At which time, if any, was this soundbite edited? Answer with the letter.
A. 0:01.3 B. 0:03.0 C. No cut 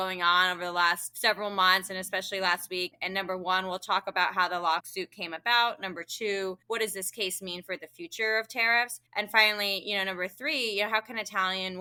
C